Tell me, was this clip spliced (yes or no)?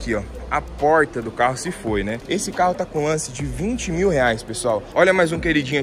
yes